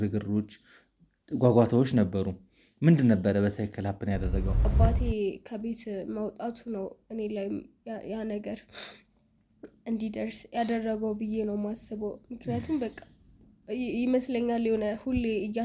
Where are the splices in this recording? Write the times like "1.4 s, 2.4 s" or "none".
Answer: 4.6 s